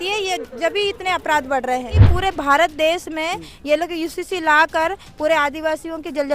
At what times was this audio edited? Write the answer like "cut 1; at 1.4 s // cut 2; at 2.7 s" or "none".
cut 1; at 2.0 s